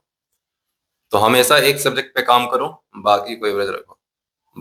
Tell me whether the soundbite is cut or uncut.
uncut